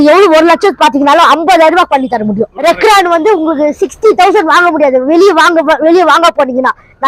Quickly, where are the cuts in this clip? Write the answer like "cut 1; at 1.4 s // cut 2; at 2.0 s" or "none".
cut 1; at 2.5 s